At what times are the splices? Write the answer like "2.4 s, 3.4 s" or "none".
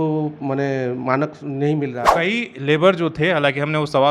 2.1 s